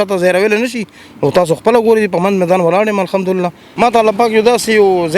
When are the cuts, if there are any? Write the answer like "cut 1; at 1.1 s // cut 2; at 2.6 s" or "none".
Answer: cut 1; at 3.6 s